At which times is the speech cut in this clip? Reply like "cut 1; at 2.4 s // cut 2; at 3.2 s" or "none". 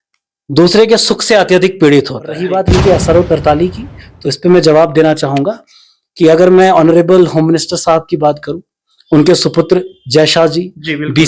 cut 1; at 2.5 s